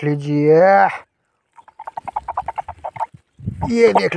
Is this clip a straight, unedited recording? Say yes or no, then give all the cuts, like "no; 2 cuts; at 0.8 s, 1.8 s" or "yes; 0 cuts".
yes; 0 cuts